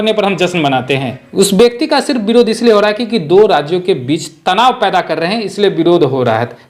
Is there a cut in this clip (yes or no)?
yes